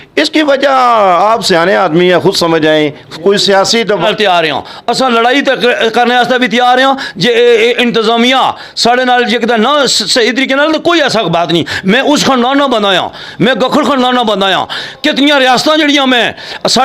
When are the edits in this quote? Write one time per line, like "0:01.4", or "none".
0:04.0